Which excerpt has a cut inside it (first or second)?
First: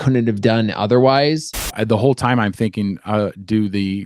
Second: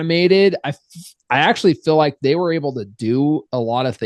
first